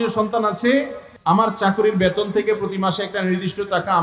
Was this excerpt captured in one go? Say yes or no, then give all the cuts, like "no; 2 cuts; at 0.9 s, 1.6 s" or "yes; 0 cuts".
no; 1 cut; at 1.0 s